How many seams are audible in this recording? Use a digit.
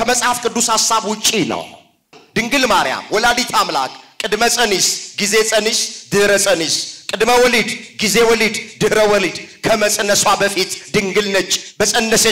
1